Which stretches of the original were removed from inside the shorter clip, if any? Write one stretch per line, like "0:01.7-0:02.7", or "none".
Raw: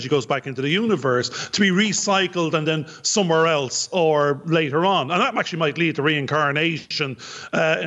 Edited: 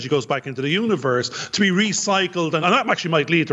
0:02.6-0:05.1